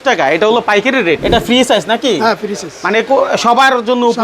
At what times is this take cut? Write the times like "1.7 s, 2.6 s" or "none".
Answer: 1.2 s